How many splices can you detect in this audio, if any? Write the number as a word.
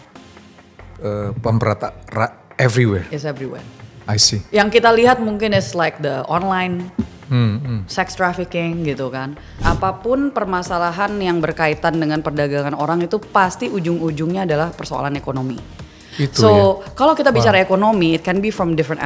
one